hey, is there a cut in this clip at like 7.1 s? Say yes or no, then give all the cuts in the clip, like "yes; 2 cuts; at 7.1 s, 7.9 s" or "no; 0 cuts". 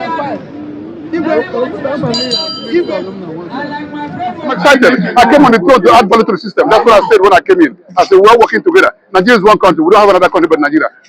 no; 1 cut; at 4.6 s